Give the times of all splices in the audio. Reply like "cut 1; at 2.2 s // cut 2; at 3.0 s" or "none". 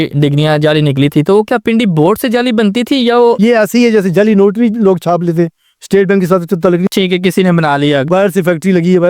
cut 1; at 3.4 s